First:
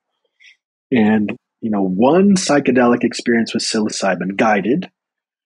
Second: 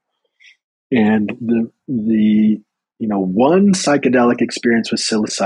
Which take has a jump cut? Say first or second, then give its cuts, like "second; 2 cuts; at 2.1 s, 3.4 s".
first; 1 cut; at 1.4 s